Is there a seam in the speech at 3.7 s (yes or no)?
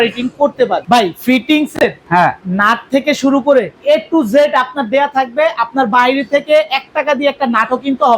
yes